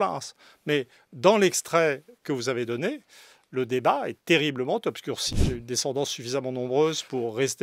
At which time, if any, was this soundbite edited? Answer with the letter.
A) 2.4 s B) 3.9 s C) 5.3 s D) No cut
C